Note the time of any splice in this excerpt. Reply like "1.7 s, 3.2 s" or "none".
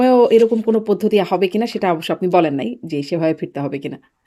none